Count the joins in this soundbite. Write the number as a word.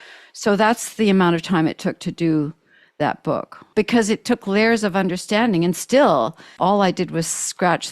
two